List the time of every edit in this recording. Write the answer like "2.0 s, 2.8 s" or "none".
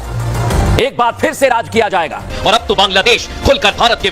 2.2 s